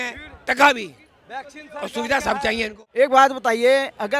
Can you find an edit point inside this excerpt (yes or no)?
yes